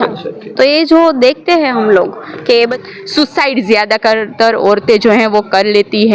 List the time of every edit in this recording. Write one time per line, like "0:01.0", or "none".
0:02.8